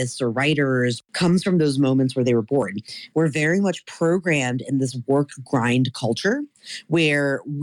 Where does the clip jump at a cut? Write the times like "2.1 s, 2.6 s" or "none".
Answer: 1.0 s, 3.0 s